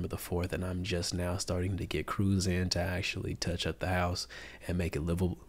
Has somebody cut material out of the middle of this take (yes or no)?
no